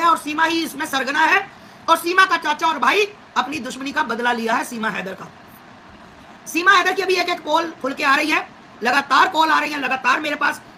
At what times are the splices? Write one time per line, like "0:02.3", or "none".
none